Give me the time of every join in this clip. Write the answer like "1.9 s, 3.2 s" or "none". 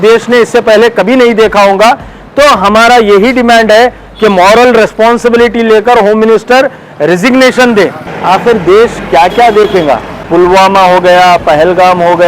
8.1 s, 10.1 s